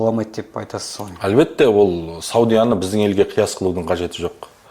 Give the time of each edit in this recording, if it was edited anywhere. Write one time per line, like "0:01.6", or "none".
none